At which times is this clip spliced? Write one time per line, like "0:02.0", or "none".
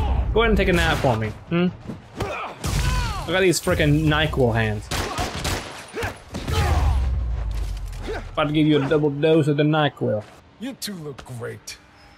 0:10.4